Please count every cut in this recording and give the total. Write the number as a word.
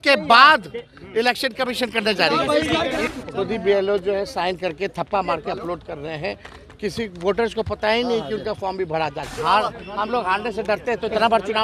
two